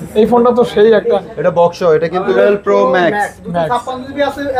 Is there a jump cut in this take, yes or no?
yes